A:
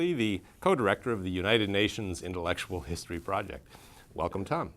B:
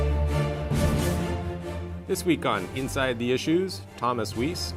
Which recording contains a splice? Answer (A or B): A